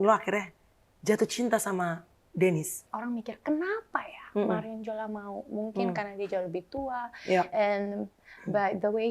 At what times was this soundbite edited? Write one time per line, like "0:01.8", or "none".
0:02.9